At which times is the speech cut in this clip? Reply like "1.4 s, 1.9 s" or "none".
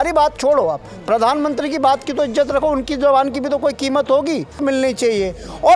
4.6 s